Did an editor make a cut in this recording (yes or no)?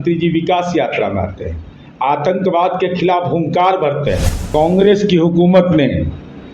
yes